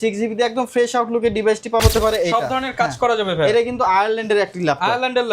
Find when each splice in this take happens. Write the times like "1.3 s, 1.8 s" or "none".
1.8 s